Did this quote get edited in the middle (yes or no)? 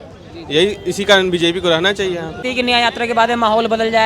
yes